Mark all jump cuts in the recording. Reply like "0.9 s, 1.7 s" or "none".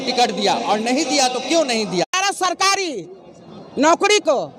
2.1 s

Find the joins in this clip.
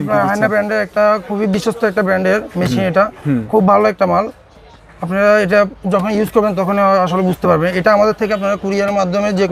none

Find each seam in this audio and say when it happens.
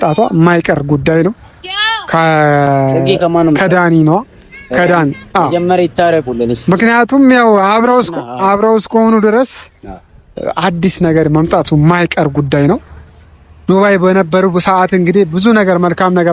none

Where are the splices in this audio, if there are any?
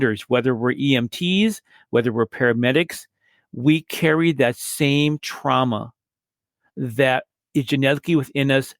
7.4 s

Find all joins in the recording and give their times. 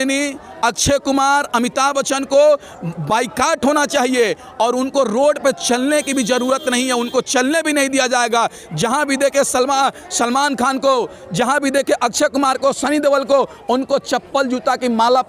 none

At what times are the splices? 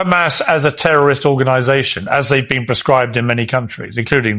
2.1 s

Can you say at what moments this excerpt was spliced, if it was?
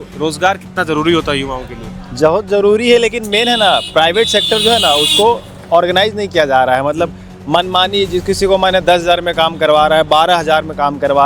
none

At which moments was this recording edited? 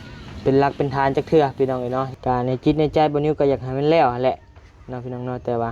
2.1 s

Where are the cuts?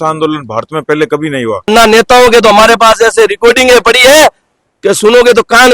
1.7 s

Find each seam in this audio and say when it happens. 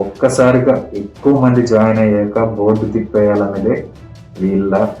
none

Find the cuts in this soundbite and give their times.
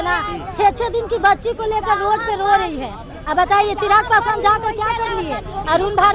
none

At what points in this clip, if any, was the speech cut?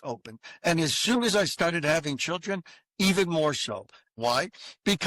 4.0 s

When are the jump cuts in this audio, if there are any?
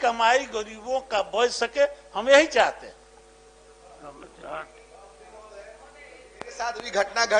none

